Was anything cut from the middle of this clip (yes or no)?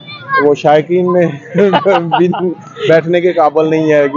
no